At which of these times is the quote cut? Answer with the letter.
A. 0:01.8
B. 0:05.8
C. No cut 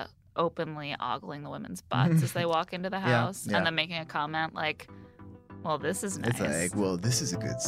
C